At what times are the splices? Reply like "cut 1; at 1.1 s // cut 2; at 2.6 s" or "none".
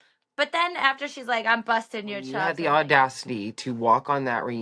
cut 1; at 2.5 s

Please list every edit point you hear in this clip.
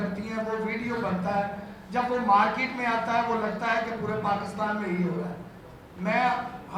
none

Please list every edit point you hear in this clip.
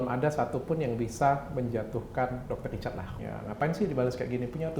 cut 1; at 3.1 s

